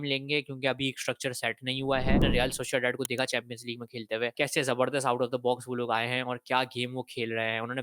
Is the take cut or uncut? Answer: cut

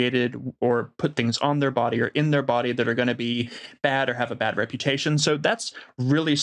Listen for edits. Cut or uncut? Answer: uncut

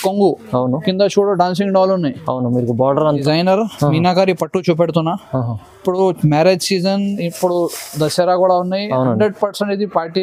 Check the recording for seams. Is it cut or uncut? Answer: cut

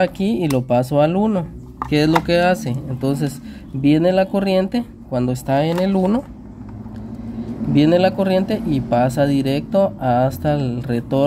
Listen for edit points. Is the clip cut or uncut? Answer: uncut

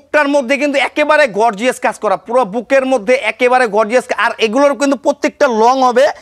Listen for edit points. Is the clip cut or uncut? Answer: uncut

